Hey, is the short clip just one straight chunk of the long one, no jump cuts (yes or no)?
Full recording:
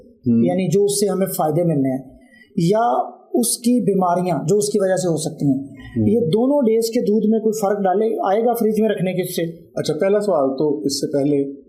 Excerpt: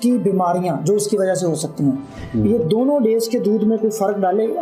yes